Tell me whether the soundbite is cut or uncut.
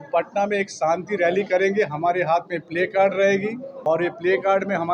uncut